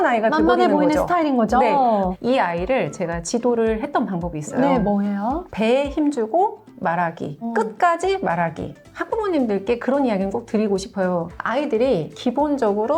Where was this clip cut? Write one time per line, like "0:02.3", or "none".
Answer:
0:02.2
0:05.5
0:08.7